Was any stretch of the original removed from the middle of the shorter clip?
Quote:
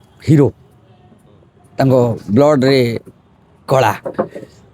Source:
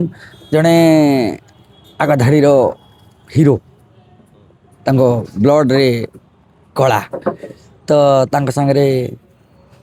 no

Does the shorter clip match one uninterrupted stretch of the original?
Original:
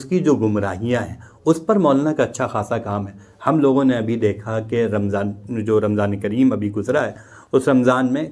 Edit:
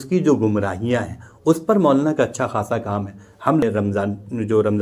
no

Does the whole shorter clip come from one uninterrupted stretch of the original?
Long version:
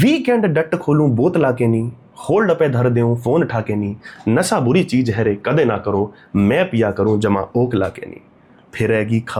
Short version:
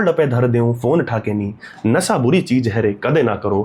yes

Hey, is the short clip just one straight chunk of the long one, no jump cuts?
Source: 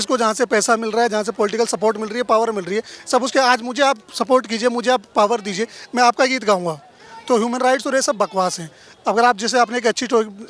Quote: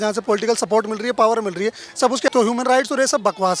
no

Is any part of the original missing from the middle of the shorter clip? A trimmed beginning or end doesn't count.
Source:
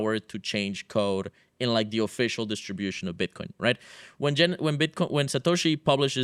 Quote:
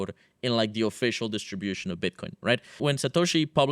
yes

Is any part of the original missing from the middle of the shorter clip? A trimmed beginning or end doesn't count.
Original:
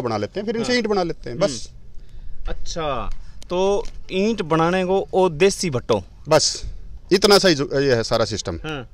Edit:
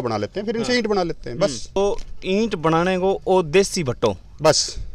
yes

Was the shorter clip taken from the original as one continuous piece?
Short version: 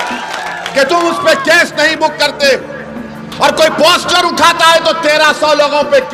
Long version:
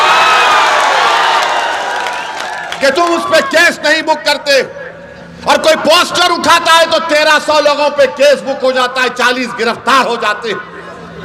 yes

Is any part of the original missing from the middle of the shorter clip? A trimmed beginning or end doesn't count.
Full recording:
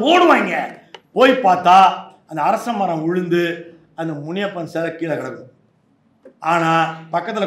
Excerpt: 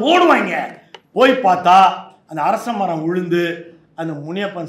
no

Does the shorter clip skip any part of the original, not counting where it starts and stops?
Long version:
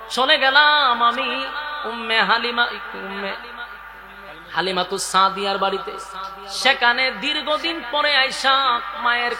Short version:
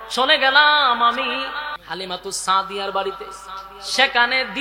yes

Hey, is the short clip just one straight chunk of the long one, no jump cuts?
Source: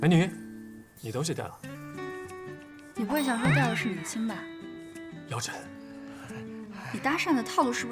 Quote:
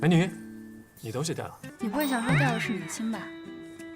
no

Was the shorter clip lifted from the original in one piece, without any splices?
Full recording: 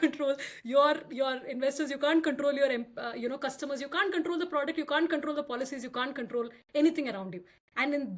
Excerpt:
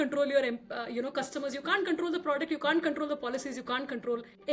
yes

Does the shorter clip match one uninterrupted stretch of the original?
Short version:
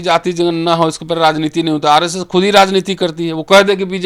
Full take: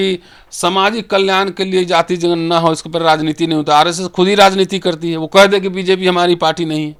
yes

